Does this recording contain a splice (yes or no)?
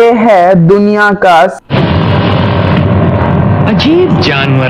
yes